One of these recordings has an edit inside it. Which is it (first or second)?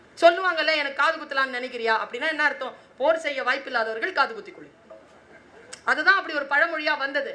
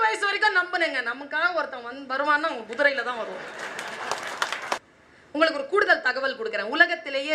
second